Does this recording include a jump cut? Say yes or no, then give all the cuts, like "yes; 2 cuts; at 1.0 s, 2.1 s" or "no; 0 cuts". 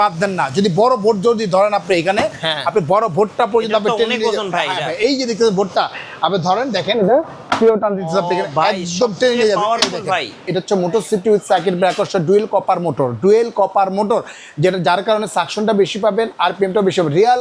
yes; 1 cut; at 10.4 s